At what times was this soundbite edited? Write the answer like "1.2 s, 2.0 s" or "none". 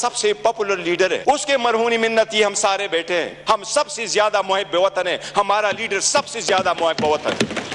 1.2 s, 3.4 s